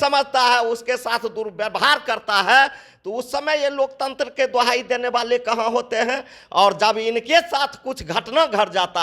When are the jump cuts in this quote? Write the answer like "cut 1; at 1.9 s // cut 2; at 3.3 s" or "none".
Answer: none